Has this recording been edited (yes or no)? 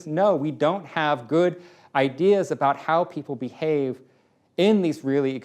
no